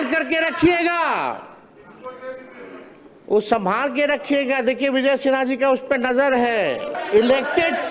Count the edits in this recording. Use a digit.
1